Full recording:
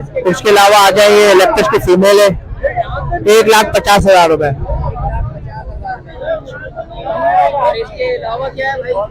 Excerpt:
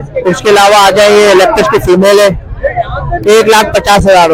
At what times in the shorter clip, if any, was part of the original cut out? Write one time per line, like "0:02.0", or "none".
none

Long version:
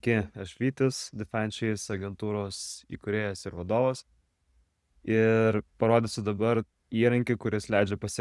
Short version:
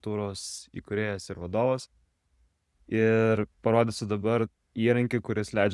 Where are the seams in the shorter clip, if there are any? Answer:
none

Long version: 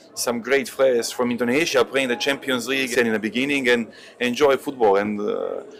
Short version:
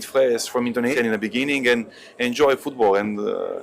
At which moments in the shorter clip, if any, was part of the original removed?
0:00.9

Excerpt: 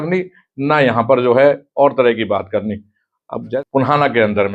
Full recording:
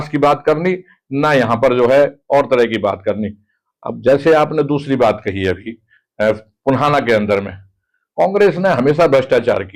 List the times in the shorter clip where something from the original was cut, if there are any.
0:03.5

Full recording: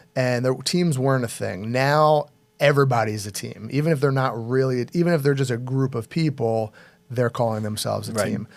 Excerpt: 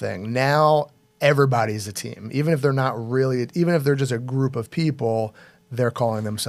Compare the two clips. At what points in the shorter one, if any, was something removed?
none

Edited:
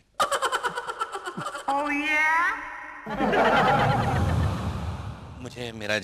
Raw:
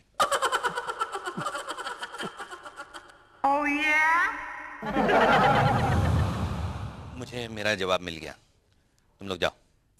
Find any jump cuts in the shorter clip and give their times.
0:01.5

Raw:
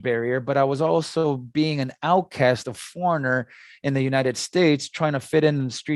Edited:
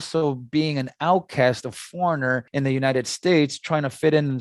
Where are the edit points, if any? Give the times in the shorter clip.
0:02.5

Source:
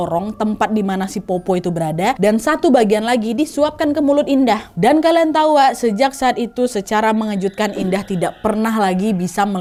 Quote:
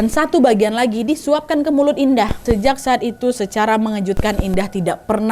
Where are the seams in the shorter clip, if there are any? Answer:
0:02.4

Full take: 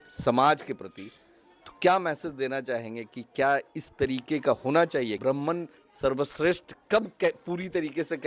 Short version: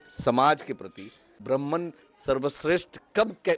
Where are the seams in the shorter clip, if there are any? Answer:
0:01.4

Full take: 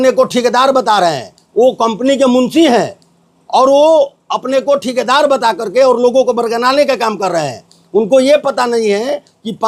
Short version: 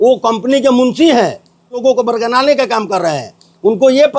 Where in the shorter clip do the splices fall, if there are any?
0:01.8

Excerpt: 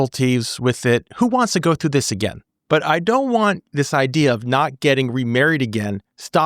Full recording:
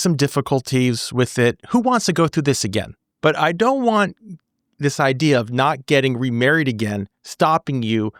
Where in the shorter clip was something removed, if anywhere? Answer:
0:03.6

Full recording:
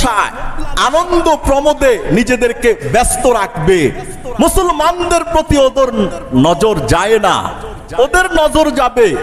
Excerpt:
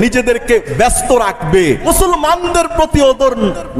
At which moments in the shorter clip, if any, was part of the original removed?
0:01.8

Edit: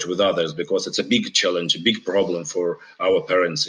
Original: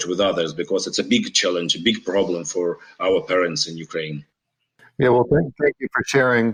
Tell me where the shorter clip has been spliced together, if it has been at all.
none

